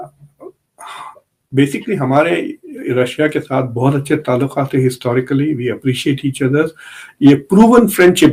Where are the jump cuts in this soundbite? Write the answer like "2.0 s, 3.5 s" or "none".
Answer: none